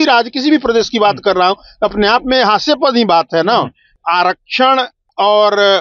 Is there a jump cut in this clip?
no; 0 cuts

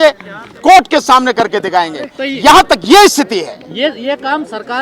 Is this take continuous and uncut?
yes; 0 cuts

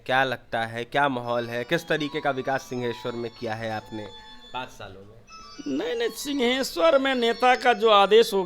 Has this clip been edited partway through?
no; 0 cuts

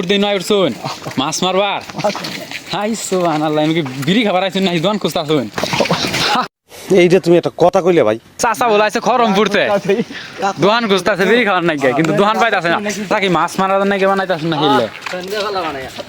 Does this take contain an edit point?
yes; 1 cut; at 13.1 s

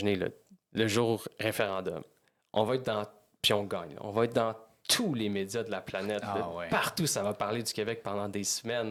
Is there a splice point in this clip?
no; 0 cuts

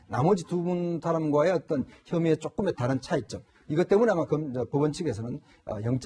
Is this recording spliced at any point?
yes; 1 cut; at 4.0 s

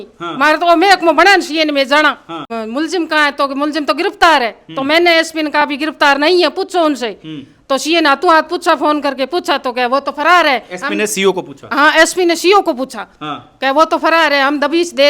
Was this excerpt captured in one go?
no; 1 cut; at 2.5 s

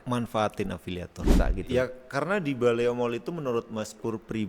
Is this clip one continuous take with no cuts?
no; 1 cut; at 1.3 s

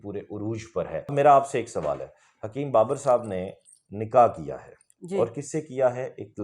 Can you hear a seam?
yes; 1 cut; at 1.1 s

